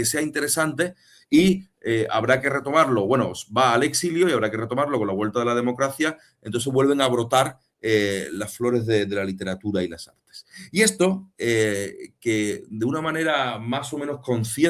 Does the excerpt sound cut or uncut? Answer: uncut